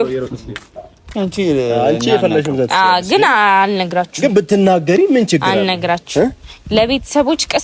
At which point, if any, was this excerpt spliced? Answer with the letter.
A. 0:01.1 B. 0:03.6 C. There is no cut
A